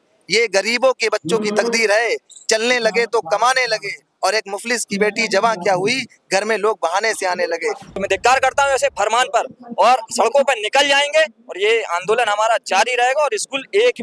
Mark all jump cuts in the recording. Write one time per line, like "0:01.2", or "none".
0:07.9